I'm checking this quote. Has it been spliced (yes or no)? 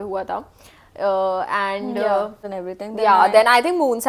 yes